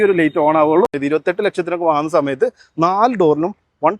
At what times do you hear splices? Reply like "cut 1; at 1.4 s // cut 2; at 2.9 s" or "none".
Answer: cut 1; at 1.0 s